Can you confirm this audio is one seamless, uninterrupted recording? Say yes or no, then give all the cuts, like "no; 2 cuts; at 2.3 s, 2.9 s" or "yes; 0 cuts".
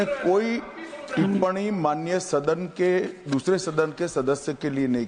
yes; 0 cuts